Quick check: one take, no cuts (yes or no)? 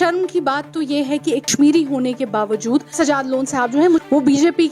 no